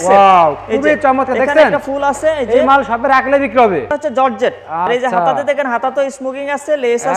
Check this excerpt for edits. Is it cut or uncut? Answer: cut